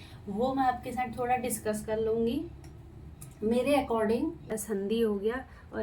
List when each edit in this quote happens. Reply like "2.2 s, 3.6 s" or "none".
4.5 s